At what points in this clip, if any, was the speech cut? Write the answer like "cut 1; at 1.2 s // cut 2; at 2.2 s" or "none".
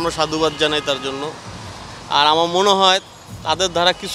none